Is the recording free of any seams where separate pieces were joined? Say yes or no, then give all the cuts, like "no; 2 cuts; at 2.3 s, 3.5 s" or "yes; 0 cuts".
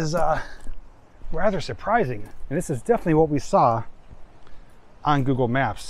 yes; 0 cuts